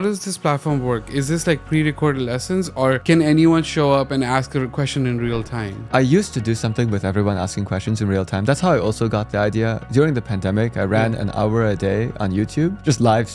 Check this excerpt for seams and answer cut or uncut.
uncut